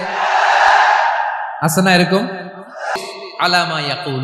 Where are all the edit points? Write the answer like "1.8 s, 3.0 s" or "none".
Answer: 2.9 s